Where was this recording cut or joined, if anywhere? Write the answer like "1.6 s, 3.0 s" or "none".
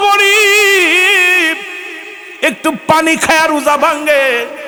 none